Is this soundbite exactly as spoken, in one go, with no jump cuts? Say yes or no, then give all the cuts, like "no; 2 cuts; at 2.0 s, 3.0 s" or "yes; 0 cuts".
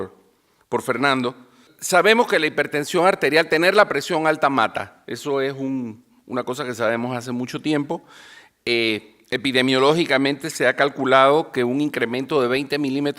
no; 1 cut; at 6.9 s